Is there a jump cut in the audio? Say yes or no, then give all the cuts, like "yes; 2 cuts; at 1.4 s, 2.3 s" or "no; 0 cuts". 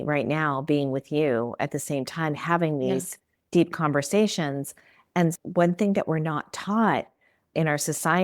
yes; 1 cut; at 5.4 s